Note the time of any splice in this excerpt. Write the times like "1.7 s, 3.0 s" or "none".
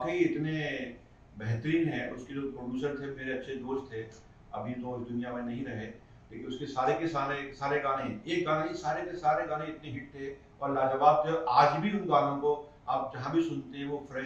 none

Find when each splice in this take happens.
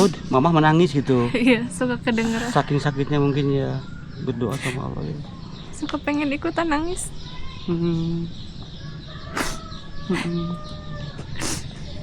none

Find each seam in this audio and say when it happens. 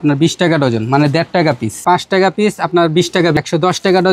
1.8 s, 3.4 s

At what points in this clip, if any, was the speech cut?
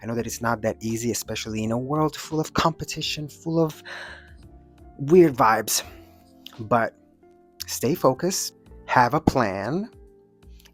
none

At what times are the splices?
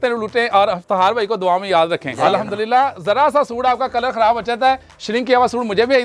2.1 s

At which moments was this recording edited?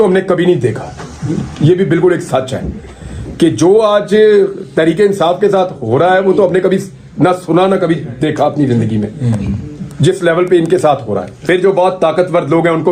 11.3 s

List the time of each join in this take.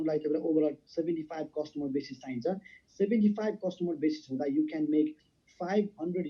none

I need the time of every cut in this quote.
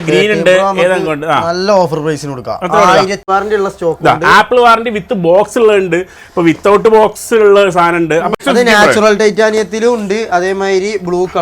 3.2 s, 8.3 s

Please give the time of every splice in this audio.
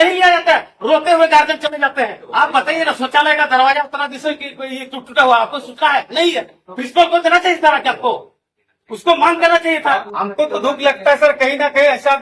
2.2 s, 10.0 s

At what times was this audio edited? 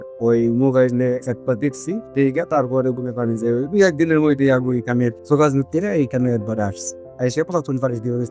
none

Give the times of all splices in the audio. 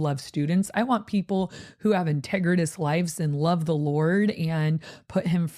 none

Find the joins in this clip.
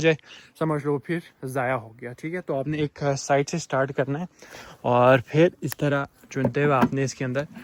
none

